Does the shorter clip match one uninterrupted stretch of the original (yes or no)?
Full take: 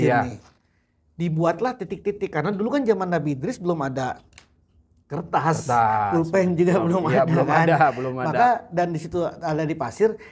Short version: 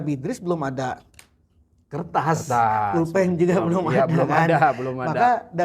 yes